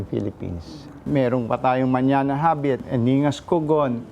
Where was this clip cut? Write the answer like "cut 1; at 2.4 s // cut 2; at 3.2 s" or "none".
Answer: cut 1; at 1.0 s // cut 2; at 2.8 s